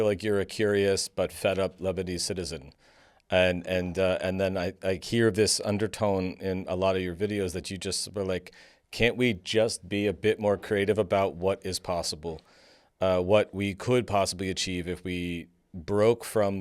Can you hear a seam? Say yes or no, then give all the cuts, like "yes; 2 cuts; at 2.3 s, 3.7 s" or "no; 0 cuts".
no; 0 cuts